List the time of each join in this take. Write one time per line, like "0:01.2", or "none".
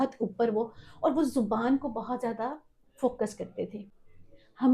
0:03.8